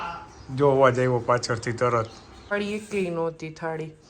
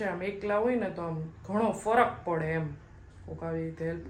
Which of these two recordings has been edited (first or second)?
first